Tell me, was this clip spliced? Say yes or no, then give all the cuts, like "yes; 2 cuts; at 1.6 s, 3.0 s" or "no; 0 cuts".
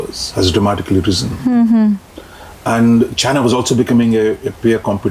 no; 0 cuts